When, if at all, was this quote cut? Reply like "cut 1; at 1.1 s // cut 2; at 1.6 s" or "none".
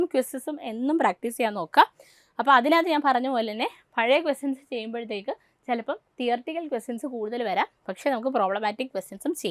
none